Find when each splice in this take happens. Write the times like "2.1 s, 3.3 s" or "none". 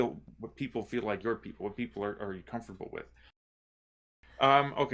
3.6 s